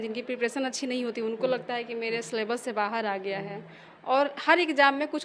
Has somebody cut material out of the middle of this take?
no; 0 cuts

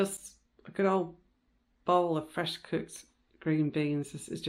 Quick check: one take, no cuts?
yes; 0 cuts

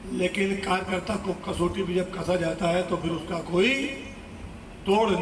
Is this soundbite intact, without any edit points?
yes; 0 cuts

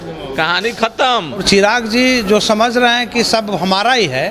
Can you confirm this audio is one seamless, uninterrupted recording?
no; 1 cut; at 1.4 s

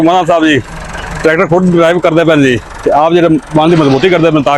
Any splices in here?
no; 0 cuts

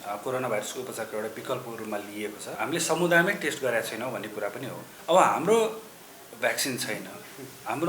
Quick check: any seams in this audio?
yes; 2 cuts; at 2.5 s, 4.9 s

